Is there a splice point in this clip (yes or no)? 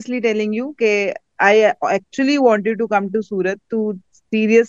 no